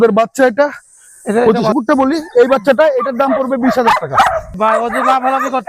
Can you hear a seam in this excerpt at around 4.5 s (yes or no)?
yes